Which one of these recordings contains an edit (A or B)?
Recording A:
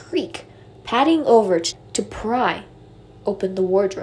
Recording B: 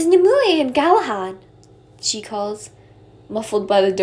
A